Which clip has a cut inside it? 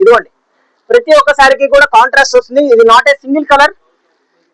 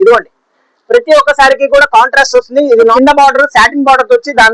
second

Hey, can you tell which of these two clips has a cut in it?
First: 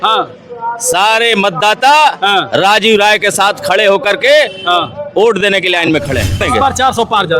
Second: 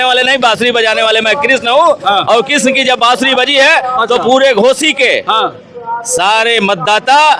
first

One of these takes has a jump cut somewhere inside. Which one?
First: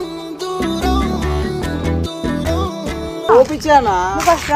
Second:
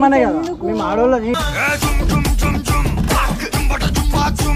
first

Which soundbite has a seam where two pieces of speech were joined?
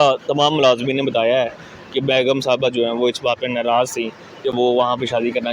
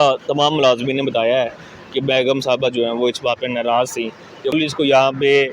second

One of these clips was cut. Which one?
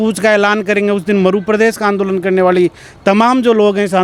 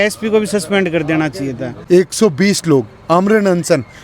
second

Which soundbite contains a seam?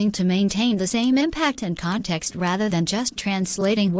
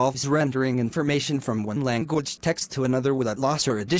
second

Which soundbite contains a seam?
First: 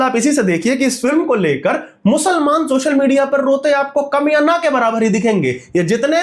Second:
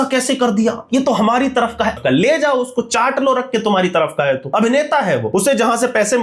second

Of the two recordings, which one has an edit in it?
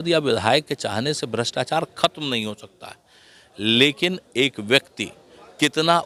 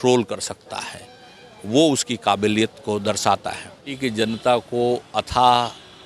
second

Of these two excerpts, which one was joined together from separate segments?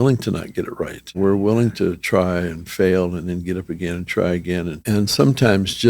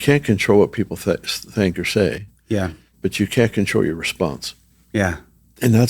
first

